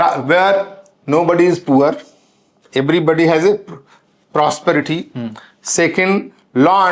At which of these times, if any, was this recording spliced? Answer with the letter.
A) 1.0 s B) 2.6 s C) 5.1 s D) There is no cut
D